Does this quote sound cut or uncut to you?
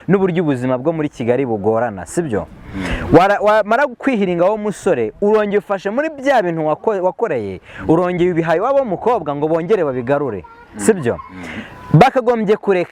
uncut